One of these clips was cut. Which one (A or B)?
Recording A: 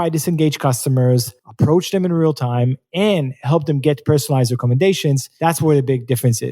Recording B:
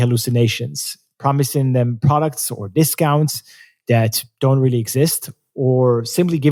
A